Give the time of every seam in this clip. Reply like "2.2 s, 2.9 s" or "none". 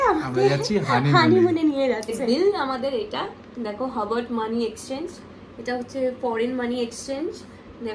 2.2 s